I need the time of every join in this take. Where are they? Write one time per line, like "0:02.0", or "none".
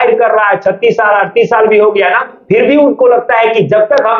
none